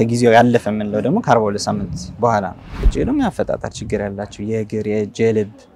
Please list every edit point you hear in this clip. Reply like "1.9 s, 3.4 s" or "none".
2.8 s